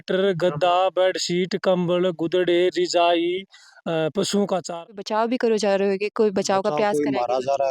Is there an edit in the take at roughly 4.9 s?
yes; 1 cut; at 4.9 s

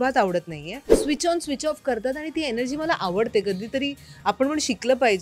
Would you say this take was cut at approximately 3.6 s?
no; 1 cut; at 1.0 s

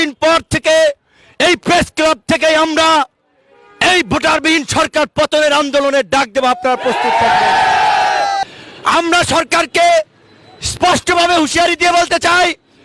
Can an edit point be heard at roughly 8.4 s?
yes; 1 cut; at 8.4 s

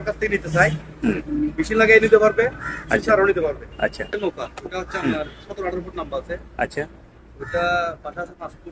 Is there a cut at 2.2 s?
no; 1 cut; at 4.1 s

